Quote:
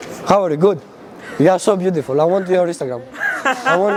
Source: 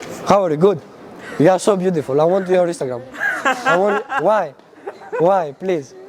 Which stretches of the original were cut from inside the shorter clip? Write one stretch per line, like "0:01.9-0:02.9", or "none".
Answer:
none